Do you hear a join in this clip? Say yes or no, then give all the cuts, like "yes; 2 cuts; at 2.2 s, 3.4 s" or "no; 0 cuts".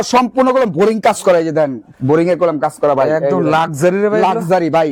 no; 0 cuts